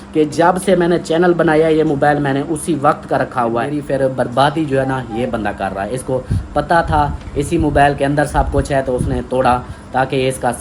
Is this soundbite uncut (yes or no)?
no